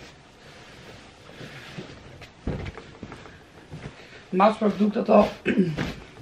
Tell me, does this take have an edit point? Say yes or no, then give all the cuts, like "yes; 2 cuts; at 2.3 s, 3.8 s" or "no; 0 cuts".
no; 0 cuts